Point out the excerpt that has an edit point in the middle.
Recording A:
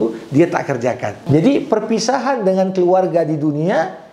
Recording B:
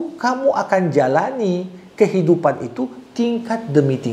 A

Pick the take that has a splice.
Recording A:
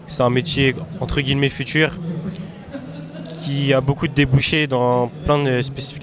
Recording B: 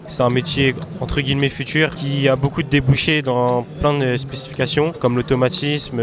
B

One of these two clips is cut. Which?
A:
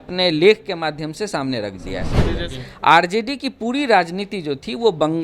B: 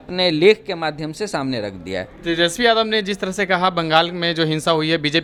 A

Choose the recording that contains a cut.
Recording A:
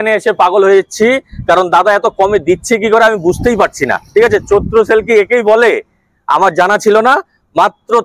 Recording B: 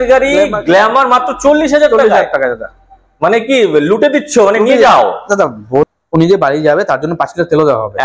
B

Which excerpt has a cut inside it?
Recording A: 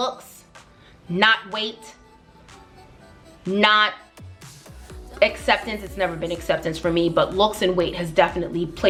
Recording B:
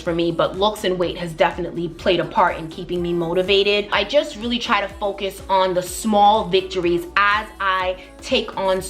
B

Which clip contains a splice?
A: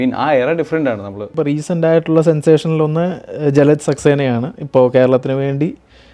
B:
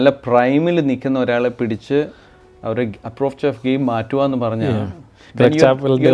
A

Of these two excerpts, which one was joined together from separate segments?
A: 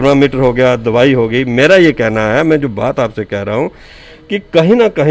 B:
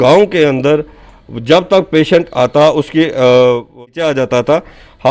B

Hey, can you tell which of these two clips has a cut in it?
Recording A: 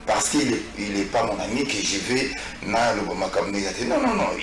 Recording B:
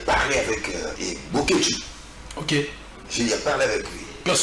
B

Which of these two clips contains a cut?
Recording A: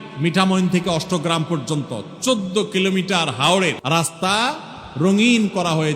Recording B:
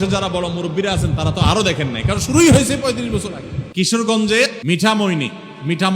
B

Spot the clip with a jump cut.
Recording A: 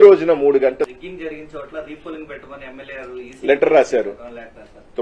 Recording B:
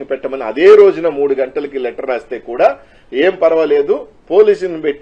A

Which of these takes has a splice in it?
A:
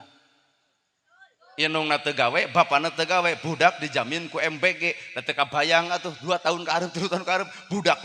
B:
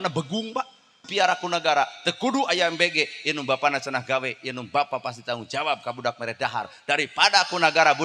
B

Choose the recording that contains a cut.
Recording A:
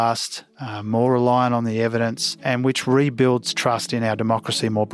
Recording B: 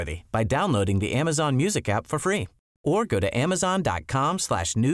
A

